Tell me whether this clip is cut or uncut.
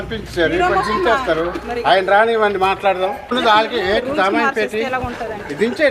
cut